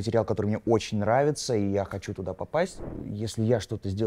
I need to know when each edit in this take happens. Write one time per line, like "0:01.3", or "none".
0:02.9